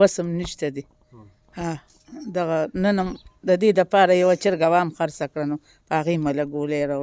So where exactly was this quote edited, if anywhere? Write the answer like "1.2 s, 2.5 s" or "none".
none